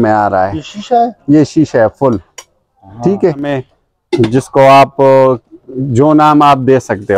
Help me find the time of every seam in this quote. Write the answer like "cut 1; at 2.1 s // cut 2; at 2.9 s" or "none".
cut 1; at 3.7 s